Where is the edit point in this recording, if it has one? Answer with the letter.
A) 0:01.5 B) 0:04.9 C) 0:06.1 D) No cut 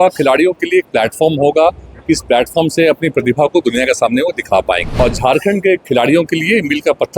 B